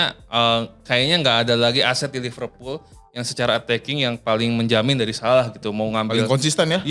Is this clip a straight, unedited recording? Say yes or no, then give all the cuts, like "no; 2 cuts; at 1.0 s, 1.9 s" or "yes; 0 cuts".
yes; 0 cuts